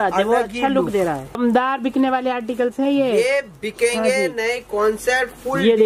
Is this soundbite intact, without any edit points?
no; 1 cut; at 1.4 s

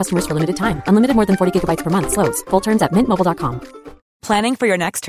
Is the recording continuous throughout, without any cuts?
yes; 0 cuts

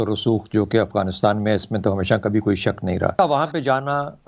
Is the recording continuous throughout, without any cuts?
no; 1 cut; at 3.2 s

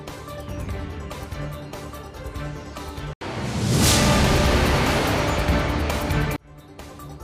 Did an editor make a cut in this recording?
yes; 1 cut; at 1.2 s

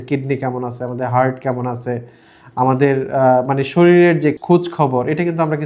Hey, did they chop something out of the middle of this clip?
yes; 1 cut; at 4.4 s

